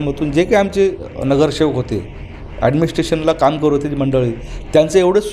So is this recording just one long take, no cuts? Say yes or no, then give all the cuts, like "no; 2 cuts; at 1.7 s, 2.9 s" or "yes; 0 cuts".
yes; 0 cuts